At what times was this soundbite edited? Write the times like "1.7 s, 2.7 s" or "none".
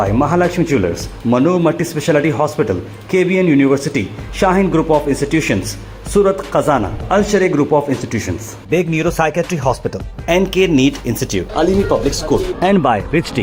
none